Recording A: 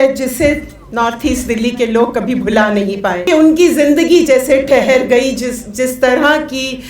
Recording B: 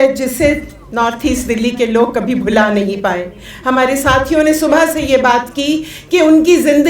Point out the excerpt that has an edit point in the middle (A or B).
A